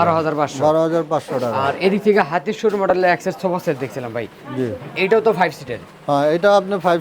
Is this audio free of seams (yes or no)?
yes